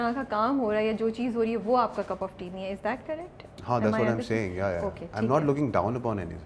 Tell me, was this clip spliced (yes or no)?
no